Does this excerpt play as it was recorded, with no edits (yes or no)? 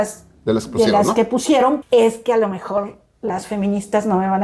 no